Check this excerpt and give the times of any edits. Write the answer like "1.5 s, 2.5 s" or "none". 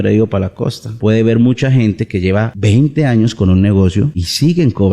1.0 s